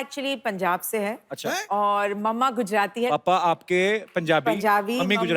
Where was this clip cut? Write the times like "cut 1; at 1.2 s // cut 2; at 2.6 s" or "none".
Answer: cut 1; at 3.1 s